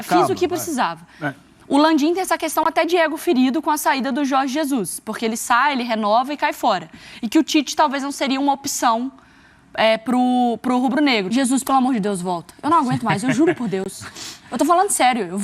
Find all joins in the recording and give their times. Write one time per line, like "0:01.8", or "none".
0:11.3